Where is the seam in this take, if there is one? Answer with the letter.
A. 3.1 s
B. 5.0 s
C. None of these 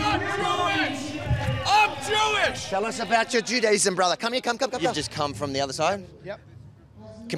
B